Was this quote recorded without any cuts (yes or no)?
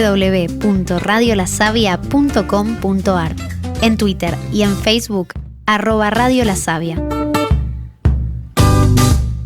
no